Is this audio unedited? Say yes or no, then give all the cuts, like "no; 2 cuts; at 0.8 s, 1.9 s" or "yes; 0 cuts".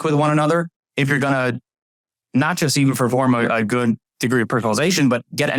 yes; 0 cuts